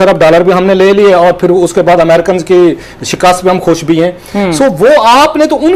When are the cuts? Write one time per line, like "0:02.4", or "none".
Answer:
none